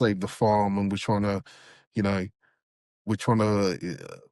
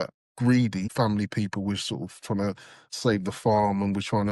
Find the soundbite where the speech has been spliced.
second; 1 cut; at 0.9 s

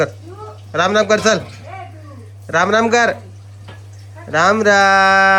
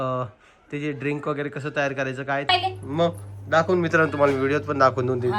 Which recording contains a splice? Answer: second; 1 cut; at 2.5 s

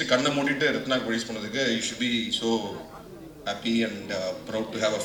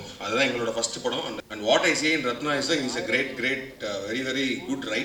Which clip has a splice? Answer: second; 1 cut; at 1.4 s

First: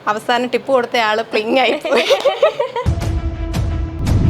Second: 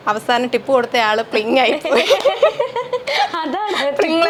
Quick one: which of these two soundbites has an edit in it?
first; 1 cut; at 2.9 s

